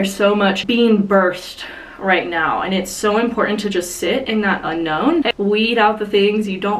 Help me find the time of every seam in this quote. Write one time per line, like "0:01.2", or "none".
0:05.3